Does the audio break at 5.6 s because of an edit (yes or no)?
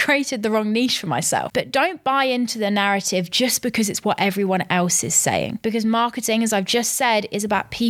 yes